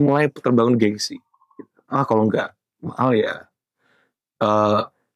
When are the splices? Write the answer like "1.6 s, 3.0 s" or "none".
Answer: none